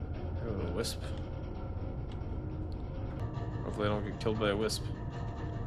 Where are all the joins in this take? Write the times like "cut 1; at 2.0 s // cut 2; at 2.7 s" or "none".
cut 1; at 3.2 s